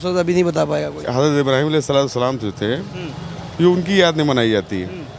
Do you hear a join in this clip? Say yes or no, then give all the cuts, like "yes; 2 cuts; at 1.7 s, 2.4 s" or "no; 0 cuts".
yes; 1 cut; at 1.0 s